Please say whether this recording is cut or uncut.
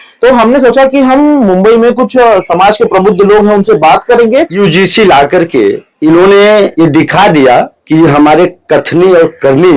cut